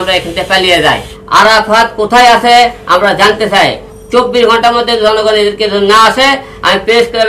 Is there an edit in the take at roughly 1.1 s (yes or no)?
yes